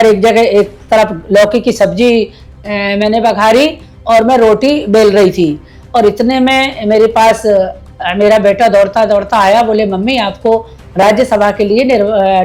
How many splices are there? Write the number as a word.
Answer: zero